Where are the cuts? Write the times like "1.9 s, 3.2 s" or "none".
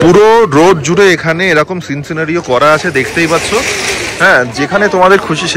none